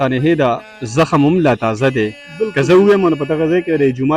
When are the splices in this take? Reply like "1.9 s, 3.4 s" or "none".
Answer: none